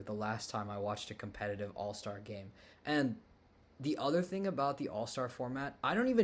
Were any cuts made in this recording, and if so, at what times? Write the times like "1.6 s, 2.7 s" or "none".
none